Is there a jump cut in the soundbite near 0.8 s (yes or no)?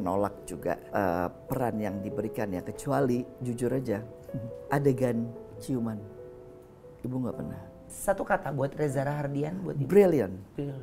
yes